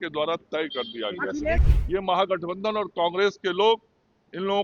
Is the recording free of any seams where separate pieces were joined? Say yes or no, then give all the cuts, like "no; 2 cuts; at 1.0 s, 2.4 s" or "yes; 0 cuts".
no; 1 cut; at 1.6 s